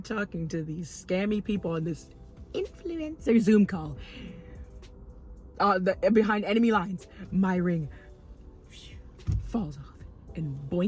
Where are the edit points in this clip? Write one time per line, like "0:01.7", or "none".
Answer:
none